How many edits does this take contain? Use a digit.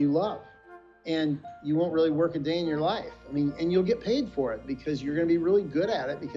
0